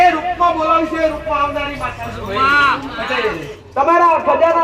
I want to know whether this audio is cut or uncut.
cut